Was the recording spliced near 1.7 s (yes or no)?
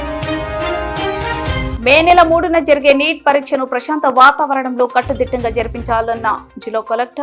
yes